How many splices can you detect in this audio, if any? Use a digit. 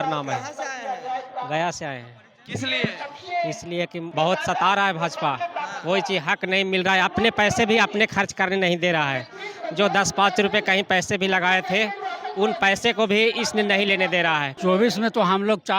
2